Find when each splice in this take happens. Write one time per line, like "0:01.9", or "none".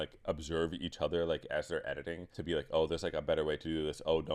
0:02.3